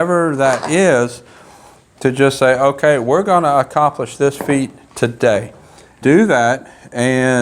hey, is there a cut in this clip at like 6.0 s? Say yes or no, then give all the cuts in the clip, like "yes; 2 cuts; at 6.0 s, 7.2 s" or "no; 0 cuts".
yes; 1 cut; at 6.0 s